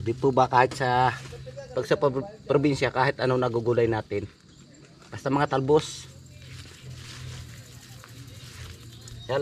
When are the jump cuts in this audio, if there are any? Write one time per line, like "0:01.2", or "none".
none